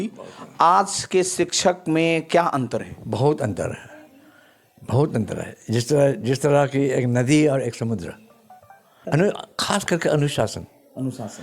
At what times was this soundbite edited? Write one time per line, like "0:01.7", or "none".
0:08.9

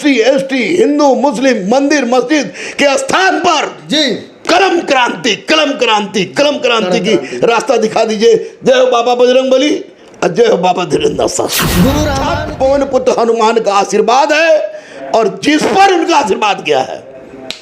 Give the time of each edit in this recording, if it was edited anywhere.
0:12.2

